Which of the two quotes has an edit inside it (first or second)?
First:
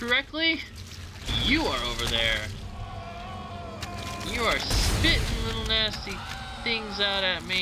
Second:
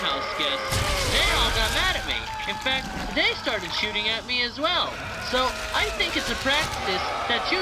first